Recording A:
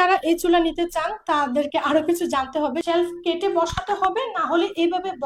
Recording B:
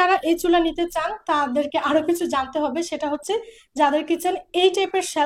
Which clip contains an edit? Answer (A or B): A